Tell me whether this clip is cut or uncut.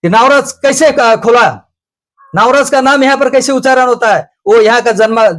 uncut